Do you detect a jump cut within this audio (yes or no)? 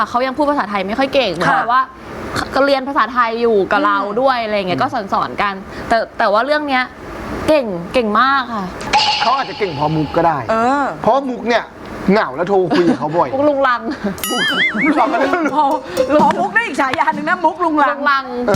no